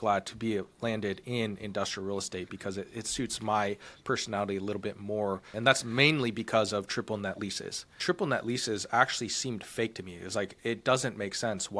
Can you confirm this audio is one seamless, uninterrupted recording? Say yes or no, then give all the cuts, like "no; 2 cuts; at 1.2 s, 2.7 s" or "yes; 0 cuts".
no; 2 cuts; at 5.5 s, 8.0 s